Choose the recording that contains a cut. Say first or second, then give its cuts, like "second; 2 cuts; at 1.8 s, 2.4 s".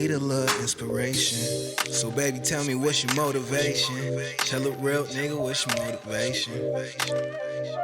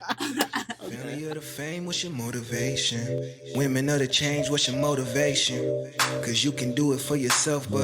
second; 1 cut; at 0.9 s